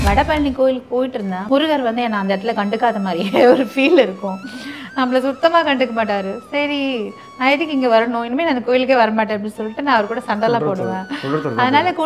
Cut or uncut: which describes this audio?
cut